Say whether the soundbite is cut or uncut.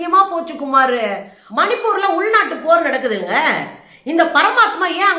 cut